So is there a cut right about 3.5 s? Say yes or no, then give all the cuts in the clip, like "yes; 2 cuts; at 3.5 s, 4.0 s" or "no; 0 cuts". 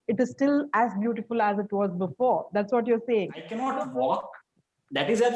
yes; 1 cut; at 3.5 s